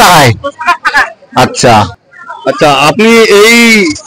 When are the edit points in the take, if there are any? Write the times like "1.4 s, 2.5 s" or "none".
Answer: 1.9 s